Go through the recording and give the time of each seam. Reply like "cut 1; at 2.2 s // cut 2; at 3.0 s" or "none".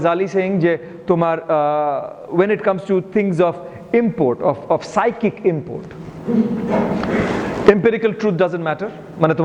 none